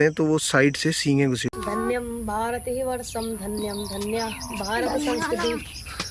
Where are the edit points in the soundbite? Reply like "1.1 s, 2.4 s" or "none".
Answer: 1.5 s

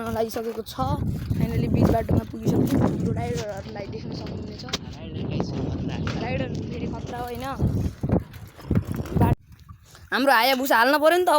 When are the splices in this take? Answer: 9.3 s

